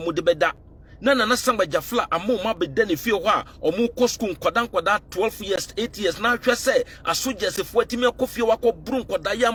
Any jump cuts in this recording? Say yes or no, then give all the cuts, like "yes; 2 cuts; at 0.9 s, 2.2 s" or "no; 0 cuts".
no; 0 cuts